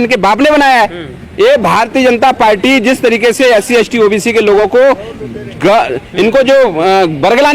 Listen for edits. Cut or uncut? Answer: uncut